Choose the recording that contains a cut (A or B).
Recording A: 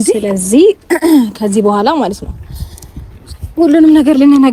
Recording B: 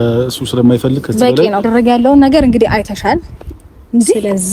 B